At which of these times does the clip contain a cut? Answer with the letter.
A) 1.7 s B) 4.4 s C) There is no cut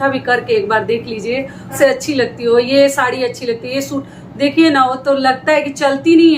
A